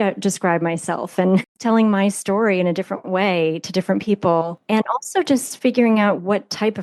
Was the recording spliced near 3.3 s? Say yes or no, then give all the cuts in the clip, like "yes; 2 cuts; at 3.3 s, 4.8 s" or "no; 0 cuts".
no; 2 cuts; at 1.5 s, 4.6 s